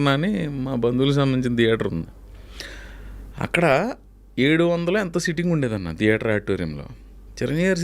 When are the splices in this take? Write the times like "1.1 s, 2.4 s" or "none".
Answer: none